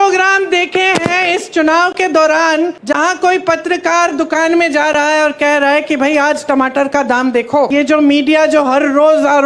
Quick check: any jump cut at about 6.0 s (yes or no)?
no